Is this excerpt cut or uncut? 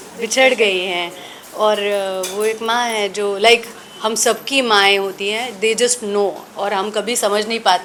uncut